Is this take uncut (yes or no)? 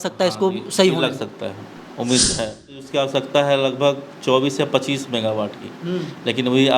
no